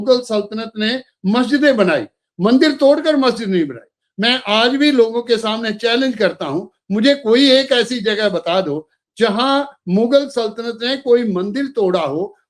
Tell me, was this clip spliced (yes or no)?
no